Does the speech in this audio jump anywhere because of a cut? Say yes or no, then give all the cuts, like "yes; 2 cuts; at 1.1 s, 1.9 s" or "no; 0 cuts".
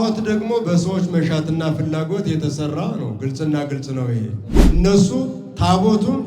yes; 1 cut; at 4.5 s